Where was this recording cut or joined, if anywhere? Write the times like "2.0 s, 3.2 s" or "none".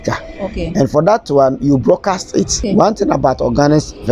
2.6 s